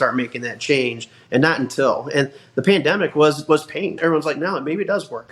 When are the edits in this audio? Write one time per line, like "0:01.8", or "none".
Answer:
0:03.9